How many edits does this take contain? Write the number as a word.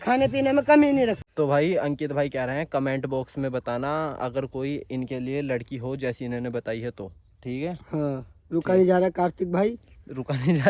one